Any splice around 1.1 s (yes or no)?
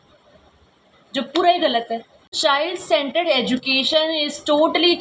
no